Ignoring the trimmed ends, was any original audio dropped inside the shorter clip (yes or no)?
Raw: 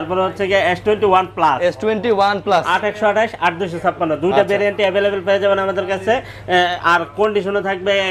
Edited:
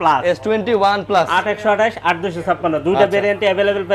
no